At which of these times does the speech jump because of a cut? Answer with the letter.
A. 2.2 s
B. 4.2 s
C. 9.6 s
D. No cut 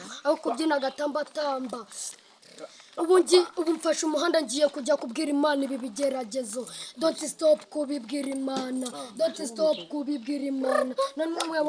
D